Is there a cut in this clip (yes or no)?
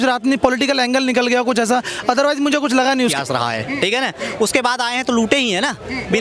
yes